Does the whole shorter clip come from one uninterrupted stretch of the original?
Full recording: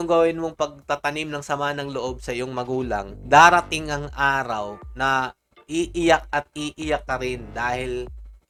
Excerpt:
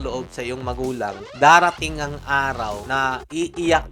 no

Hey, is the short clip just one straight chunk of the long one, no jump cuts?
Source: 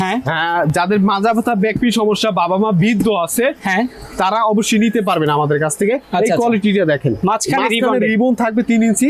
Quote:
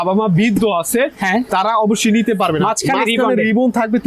no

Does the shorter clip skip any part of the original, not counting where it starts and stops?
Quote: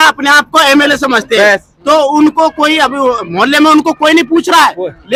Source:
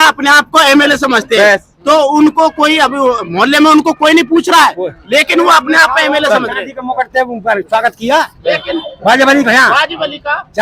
no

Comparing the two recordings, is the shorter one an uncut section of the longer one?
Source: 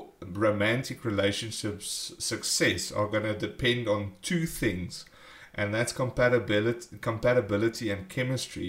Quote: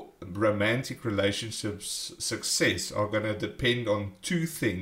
yes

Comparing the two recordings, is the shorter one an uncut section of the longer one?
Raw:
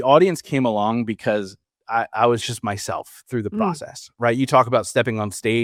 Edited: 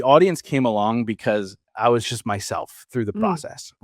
no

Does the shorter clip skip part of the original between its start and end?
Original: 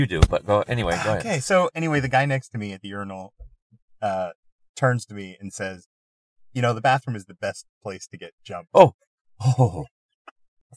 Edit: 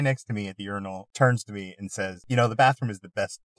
yes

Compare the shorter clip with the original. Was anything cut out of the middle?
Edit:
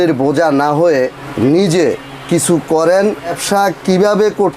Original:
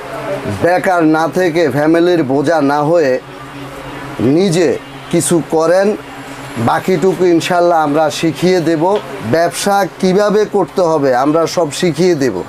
yes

